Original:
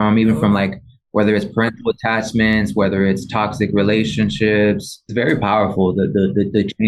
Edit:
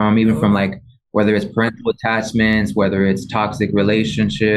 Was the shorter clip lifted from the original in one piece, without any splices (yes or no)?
yes